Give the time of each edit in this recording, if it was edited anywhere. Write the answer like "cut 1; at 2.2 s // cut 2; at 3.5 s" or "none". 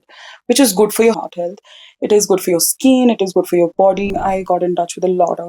cut 1; at 1.2 s // cut 2; at 4.1 s